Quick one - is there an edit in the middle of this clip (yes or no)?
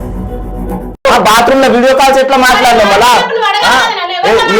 yes